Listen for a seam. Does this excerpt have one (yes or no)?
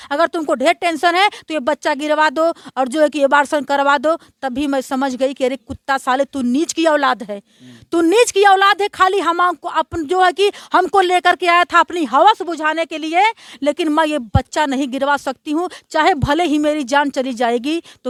no